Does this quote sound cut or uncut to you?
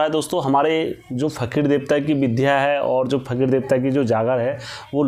uncut